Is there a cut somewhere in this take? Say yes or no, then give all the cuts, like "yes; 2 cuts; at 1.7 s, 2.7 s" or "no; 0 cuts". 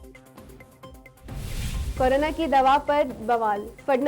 yes; 1 cut; at 1.2 s